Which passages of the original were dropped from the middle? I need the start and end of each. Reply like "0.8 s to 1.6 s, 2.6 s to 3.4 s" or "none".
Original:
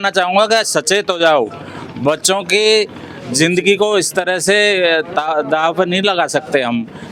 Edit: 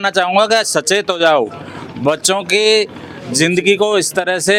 none

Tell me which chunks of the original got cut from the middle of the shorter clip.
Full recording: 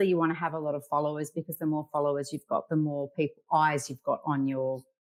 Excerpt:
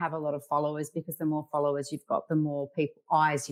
none

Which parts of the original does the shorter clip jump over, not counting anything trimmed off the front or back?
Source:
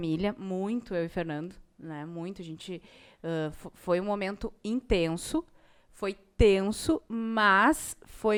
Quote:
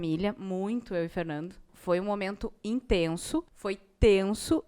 1.7 s to 3.7 s, 5.5 s to 5.9 s

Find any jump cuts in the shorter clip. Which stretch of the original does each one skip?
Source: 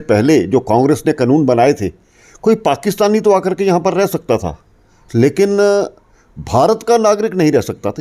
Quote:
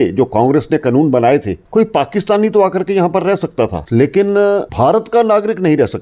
1.9 s to 2.3 s, 4.5 s to 5.0 s, 5.9 s to 6.4 s

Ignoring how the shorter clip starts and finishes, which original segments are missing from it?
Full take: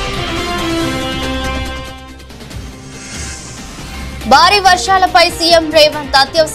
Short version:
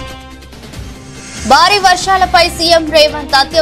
3.1 s to 4.2 s

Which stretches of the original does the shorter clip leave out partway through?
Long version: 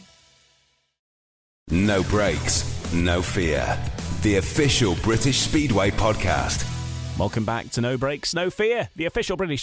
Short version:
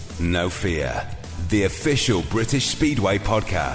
none

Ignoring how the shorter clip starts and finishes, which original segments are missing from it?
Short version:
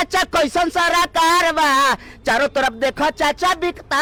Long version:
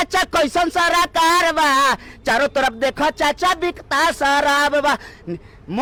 none

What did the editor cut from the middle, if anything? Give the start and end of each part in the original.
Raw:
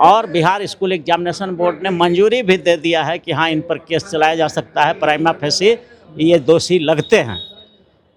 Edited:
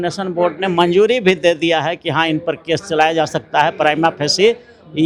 none

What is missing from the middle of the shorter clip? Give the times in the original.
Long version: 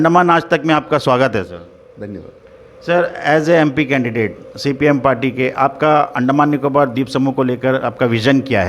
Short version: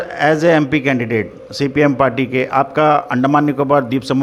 none

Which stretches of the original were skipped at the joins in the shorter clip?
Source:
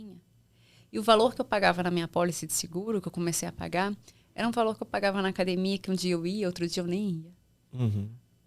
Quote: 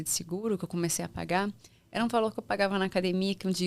none

